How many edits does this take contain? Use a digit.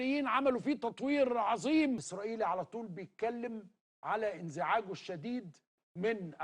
1